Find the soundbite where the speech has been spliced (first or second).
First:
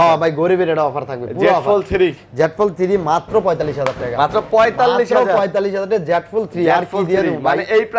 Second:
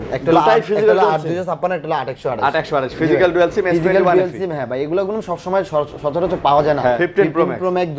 second